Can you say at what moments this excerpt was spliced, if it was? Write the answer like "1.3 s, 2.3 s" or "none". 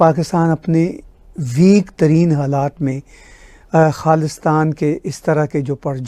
none